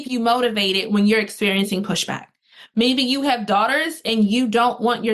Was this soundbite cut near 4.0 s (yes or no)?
no